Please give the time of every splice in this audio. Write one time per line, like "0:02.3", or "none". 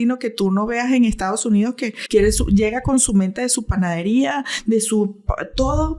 0:01.9